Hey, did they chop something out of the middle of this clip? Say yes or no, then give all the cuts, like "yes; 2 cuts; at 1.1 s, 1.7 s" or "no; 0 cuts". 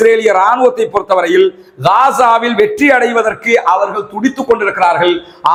no; 0 cuts